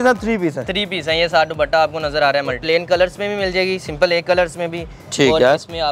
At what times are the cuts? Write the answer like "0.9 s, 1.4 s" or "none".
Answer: 2.6 s